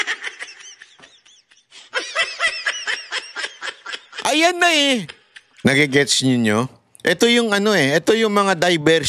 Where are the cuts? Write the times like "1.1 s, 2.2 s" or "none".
5.6 s